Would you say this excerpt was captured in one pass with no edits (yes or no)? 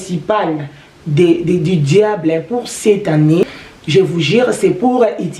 no